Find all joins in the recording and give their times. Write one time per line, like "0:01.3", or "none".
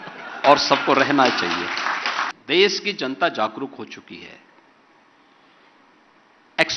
0:02.3